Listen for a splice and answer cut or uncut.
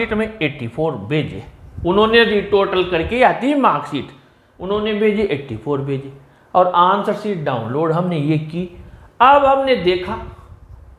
uncut